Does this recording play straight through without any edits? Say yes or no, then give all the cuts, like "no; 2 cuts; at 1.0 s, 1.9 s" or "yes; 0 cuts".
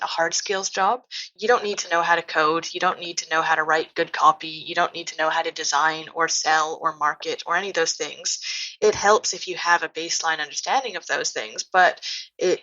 yes; 0 cuts